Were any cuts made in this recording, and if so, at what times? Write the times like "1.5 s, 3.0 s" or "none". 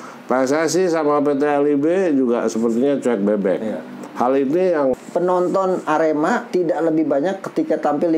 4.9 s